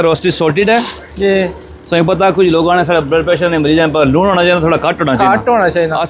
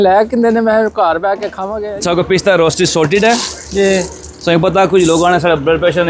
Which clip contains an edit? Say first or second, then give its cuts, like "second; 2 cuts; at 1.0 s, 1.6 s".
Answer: second; 1 cut; at 1.6 s